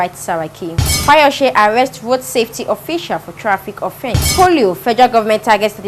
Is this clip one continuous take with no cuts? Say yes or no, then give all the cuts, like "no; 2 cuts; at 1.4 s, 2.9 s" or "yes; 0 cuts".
no; 2 cuts; at 0.9 s, 4.2 s